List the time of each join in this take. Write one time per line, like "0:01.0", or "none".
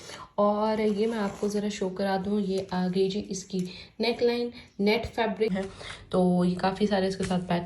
0:05.5